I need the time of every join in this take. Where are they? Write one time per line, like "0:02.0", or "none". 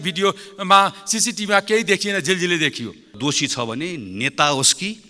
0:03.2